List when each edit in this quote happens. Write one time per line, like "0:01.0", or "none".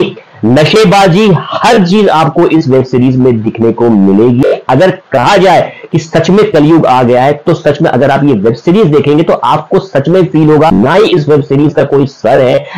0:10.7